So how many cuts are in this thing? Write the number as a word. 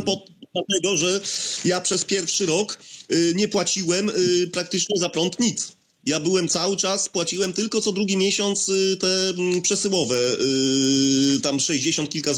zero